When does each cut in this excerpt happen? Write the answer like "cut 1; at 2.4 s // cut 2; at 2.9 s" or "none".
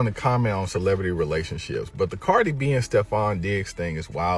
none

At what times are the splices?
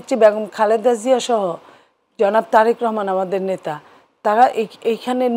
none

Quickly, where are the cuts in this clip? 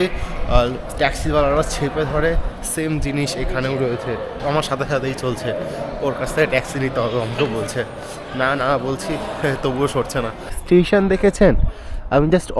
cut 1; at 4.4 s // cut 2; at 10.6 s

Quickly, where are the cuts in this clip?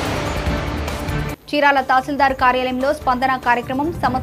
cut 1; at 1.2 s

